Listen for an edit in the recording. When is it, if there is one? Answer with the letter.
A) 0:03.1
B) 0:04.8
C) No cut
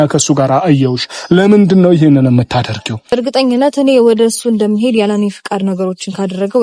A